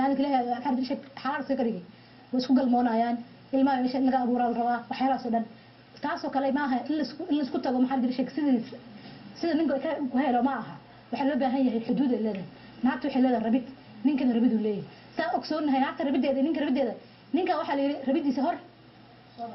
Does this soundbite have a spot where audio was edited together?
yes; 1 cut; at 13.3 s

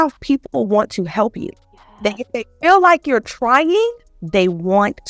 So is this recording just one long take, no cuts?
yes; 0 cuts

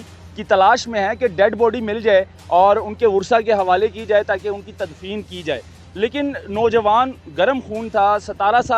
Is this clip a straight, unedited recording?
yes; 0 cuts

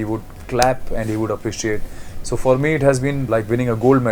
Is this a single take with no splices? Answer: no; 1 cut; at 3.2 s

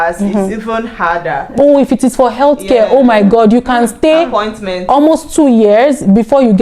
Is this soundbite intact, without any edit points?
no; 1 cut; at 1.6 s

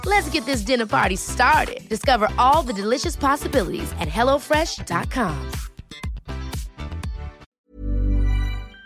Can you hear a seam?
yes; 1 cut; at 7.5 s

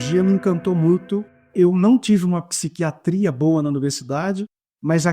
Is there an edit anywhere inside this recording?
yes; 1 cut; at 1.5 s

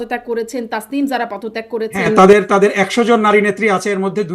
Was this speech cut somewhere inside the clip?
no; 0 cuts

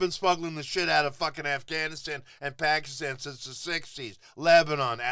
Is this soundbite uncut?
yes; 0 cuts

